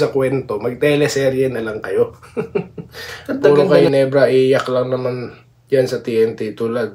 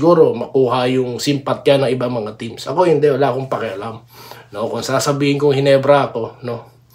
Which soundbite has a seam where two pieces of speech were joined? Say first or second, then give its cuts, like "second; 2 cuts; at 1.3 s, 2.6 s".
first; 1 cut; at 3.5 s